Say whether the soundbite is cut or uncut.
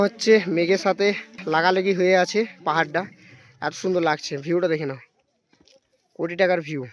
cut